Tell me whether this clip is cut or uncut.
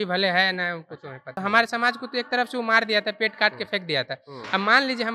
cut